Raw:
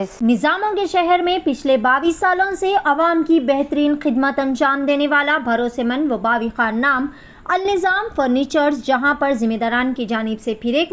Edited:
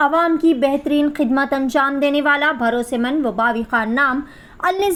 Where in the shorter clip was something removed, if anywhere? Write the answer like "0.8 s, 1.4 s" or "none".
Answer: none